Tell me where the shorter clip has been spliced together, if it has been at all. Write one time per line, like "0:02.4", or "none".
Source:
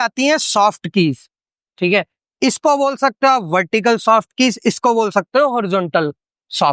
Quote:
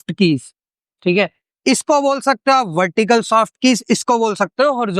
none